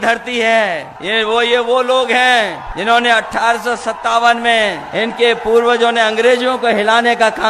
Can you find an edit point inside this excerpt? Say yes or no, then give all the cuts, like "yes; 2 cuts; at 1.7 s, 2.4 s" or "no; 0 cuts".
yes; 3 cuts; at 0.9 s, 2.7 s, 4.8 s